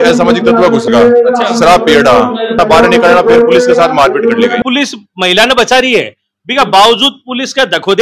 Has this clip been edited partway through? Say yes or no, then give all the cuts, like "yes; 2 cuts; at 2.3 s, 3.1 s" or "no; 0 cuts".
yes; 2 cuts; at 2.6 s, 4.6 s